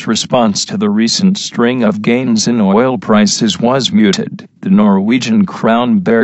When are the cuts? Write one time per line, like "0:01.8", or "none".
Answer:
0:01.8